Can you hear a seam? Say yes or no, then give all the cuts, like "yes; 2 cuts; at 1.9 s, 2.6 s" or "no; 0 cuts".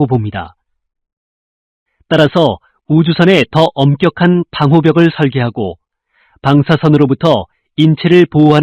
no; 0 cuts